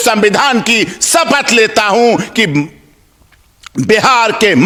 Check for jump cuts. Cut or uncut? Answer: uncut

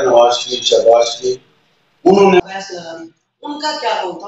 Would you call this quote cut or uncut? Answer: cut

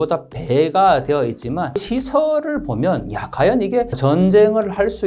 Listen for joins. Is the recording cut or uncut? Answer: cut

